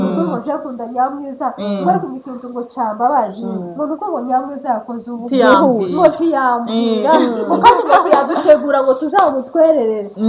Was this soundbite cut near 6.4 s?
no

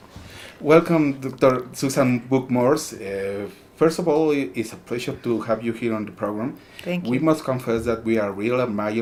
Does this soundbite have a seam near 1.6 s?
no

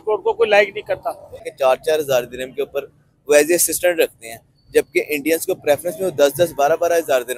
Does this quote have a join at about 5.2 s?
no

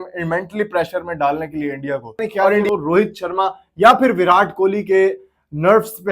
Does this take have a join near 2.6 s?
yes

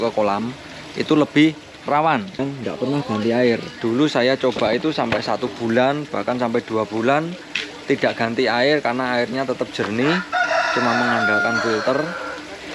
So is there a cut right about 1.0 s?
no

